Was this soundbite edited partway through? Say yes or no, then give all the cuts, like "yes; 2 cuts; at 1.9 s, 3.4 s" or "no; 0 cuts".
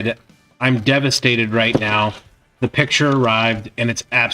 no; 0 cuts